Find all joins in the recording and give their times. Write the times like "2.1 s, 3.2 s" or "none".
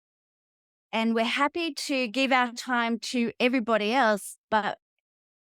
none

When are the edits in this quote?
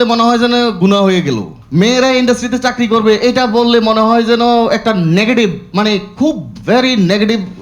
none

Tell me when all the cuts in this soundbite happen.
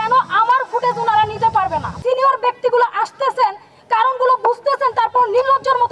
2.0 s

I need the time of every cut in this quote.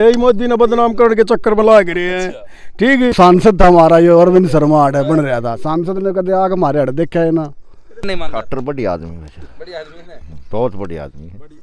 3.2 s, 8.1 s

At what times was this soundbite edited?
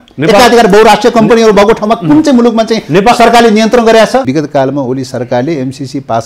4.3 s

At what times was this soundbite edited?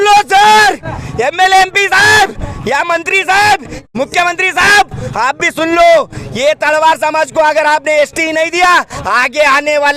3.8 s

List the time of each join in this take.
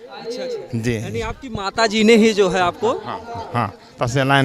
none

